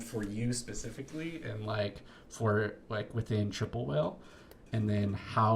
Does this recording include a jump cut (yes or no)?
no